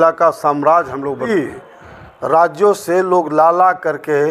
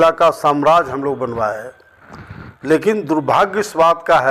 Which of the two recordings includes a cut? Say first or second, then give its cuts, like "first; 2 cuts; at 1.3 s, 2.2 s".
first; 1 cut; at 1.3 s